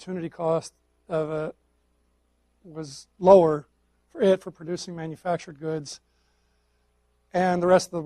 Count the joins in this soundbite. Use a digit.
0